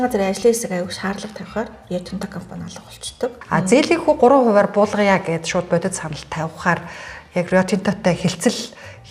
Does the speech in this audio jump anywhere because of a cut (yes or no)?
yes